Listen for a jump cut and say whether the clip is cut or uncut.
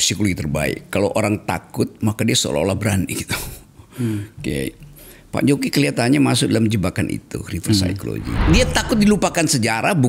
cut